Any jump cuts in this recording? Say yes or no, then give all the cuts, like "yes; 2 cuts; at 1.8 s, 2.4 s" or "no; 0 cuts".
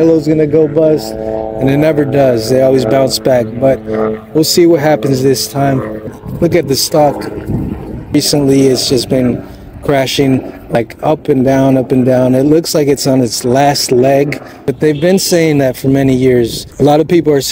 yes; 5 cuts; at 6.2 s, 8.1 s, 10.7 s, 14.7 s, 16.6 s